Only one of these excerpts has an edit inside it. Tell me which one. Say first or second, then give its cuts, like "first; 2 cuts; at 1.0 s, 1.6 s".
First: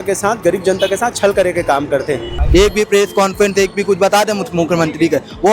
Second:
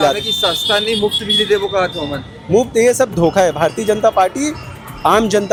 first; 1 cut; at 2.3 s